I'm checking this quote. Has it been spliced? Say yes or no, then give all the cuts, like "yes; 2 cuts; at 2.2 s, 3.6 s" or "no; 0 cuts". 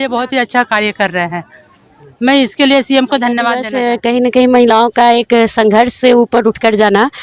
yes; 1 cut; at 3.7 s